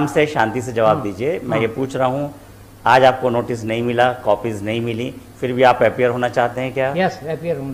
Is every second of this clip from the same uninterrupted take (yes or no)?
yes